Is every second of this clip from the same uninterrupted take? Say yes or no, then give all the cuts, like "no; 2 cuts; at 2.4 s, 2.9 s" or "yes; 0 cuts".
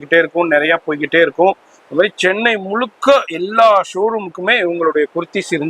yes; 0 cuts